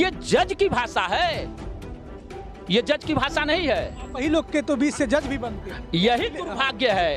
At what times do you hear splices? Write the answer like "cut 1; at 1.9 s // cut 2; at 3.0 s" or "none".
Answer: none